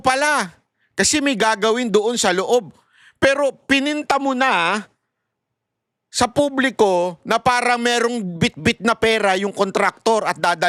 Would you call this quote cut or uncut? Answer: uncut